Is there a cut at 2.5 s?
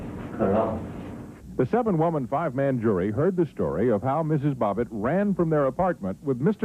yes; 1 cut; at 2.5 s

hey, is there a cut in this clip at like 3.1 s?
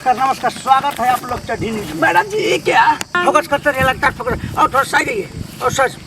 yes; 1 cut; at 3.1 s

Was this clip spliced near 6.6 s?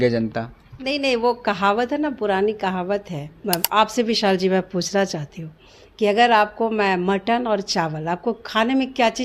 no; 1 cut; at 3.4 s

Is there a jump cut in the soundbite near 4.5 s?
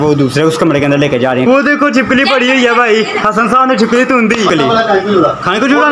yes; 2 cuts; at 1.5 s, 4.5 s

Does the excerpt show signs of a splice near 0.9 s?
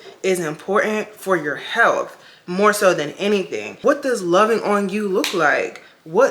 no; 1 cut; at 3.8 s

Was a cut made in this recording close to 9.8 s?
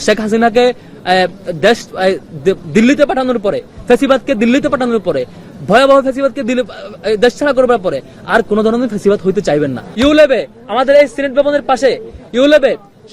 yes; 1 cut; at 9.8 s

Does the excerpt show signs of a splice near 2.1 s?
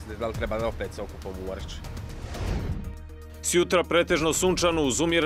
yes; 1 cut; at 2.1 s

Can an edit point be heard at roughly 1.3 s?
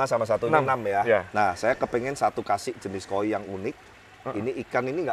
no; 0 cuts

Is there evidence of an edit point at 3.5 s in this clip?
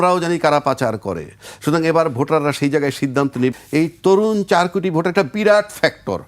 yes; 1 cut; at 3.5 s

